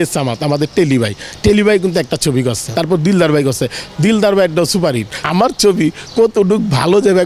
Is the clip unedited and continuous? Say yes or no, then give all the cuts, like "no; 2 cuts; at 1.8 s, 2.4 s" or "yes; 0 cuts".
no; 2 cuts; at 2.6 s, 5.2 s